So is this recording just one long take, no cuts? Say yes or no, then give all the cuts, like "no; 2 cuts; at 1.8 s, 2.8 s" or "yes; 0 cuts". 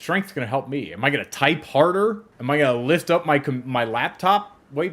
no; 1 cut; at 2.3 s